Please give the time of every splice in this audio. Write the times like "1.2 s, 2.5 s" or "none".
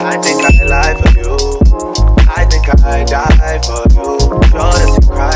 none